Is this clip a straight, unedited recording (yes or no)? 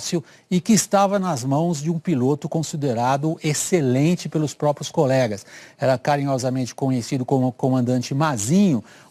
no